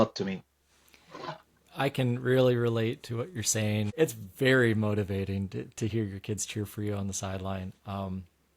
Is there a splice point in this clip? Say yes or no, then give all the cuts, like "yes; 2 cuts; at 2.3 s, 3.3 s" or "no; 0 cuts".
yes; 1 cut; at 3.9 s